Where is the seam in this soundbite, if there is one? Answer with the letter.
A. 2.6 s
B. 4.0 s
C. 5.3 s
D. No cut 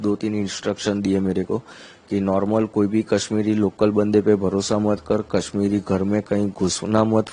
D